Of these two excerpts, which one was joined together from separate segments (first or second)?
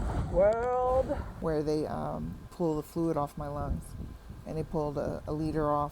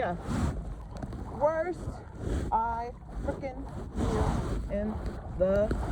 first